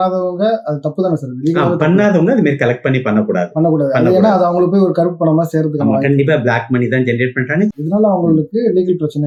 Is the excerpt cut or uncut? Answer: uncut